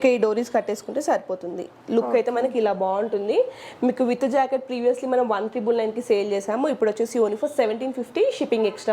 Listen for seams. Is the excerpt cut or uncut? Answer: uncut